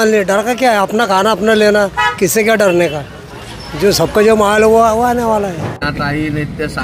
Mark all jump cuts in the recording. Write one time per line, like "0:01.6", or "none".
0:05.8

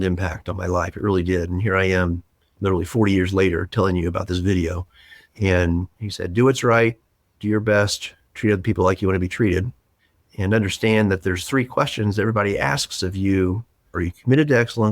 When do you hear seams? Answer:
0:13.9

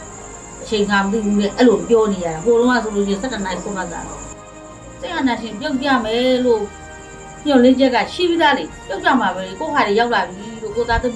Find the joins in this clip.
0:04.3

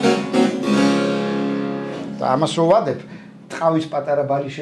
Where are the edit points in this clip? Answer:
none

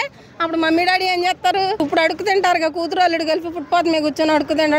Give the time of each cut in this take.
0:01.8

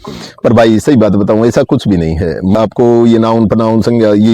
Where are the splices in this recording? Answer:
0:02.5

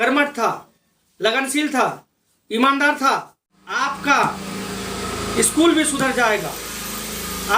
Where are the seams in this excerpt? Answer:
0:03.8

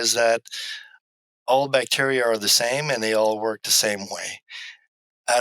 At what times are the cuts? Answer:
none

